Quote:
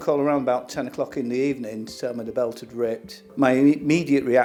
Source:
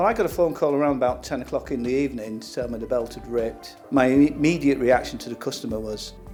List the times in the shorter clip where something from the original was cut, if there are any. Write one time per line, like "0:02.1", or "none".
none